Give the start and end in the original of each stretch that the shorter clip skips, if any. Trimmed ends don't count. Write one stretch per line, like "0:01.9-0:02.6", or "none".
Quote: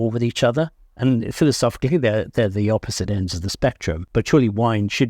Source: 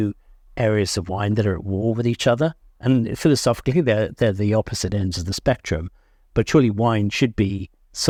0:05.9-0:06.2